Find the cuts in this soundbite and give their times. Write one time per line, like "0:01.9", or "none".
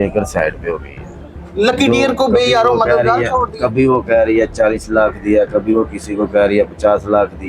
none